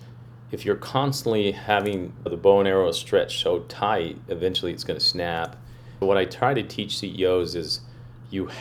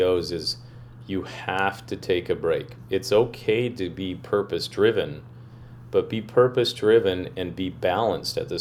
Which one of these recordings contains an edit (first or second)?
first